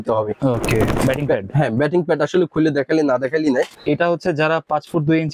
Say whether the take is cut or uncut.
cut